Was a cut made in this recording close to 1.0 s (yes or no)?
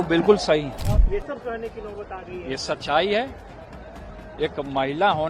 yes